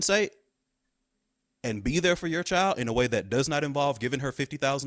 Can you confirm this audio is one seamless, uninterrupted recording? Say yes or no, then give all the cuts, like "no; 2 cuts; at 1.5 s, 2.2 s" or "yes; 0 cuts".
yes; 0 cuts